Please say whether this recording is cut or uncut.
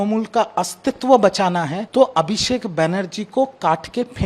cut